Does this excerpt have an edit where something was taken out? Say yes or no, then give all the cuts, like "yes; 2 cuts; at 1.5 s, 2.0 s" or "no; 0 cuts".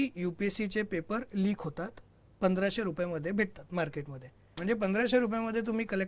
yes; 1 cut; at 4.5 s